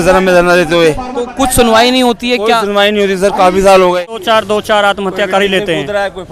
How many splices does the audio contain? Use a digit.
1